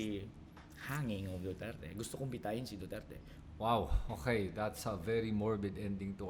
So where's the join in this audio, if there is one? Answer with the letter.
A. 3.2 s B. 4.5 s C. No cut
A